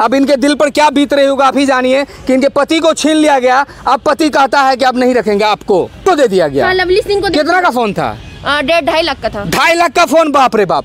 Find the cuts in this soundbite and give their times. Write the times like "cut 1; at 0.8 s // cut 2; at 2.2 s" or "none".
cut 1; at 6.1 s